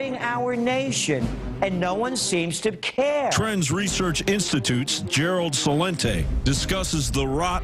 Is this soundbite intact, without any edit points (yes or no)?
no